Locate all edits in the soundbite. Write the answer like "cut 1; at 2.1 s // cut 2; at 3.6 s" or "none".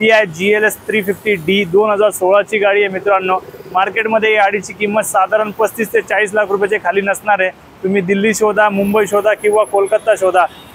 none